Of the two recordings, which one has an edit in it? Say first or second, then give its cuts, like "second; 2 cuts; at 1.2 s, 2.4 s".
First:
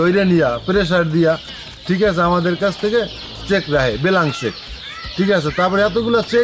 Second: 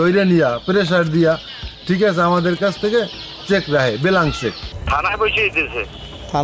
second; 1 cut; at 4.7 s